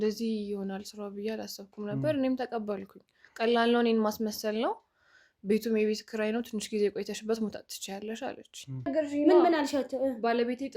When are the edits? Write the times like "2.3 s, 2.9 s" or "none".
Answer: 8.9 s